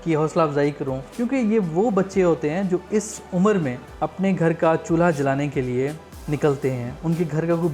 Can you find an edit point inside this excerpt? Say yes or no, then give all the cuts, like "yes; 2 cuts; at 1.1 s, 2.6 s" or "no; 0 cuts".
yes; 4 cuts; at 1.0 s, 3.8 s, 6.1 s, 6.9 s